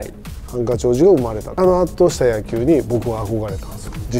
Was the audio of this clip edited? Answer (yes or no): yes